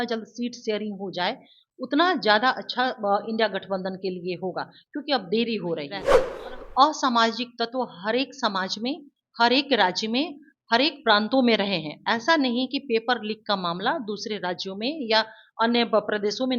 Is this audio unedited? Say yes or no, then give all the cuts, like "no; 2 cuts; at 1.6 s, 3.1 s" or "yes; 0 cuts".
no; 1 cut; at 6.3 s